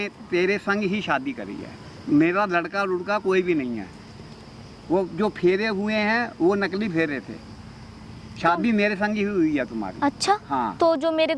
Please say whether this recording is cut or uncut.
uncut